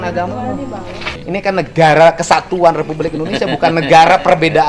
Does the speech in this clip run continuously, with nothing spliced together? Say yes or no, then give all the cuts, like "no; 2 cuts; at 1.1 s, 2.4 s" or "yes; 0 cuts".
no; 1 cut; at 1.1 s